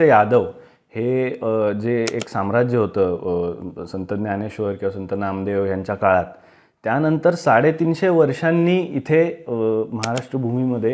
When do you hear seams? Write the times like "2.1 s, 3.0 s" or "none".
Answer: none